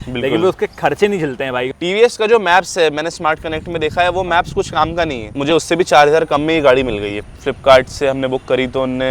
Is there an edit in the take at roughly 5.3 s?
yes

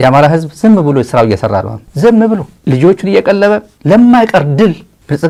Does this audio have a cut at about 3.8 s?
no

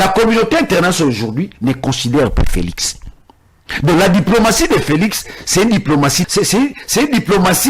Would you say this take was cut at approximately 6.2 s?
yes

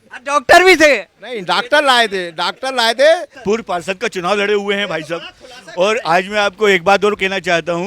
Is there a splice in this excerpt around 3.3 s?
yes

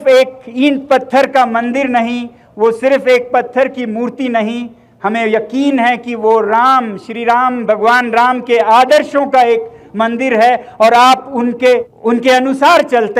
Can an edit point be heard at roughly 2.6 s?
no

